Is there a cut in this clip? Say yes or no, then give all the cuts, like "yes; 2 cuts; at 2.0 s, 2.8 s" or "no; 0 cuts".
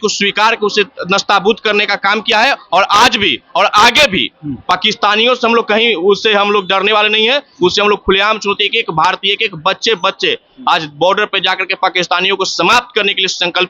no; 0 cuts